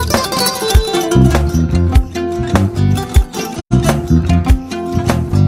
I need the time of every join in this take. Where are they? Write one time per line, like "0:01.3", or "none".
none